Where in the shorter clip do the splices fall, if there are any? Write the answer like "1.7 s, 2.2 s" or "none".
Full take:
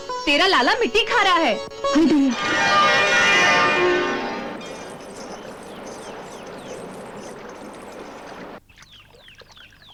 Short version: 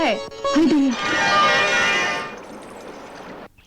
2.1 s